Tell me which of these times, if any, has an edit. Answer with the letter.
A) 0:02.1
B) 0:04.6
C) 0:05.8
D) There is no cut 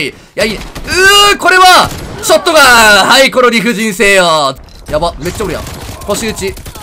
B